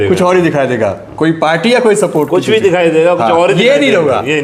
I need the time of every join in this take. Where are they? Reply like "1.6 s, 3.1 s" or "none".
none